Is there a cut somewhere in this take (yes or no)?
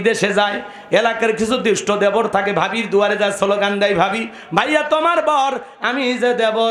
no